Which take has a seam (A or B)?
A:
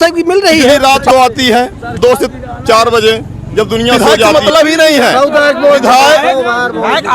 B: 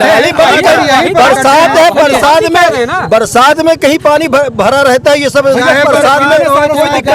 A